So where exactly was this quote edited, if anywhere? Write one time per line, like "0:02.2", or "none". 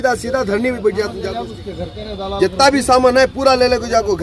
0:01.2